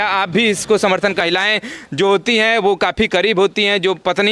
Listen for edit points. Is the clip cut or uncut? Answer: cut